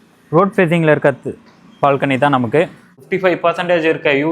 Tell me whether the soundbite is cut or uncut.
cut